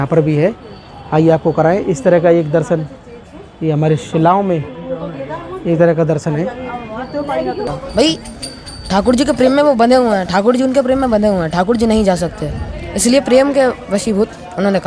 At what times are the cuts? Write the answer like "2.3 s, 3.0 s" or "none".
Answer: 7.7 s